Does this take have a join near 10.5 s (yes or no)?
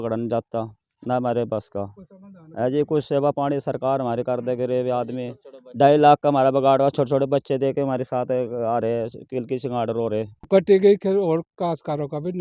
yes